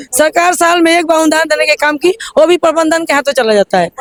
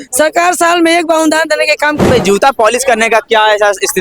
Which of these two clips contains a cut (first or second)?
second